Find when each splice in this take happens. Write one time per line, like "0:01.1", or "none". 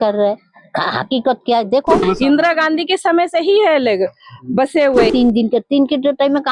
0:02.0
0:05.1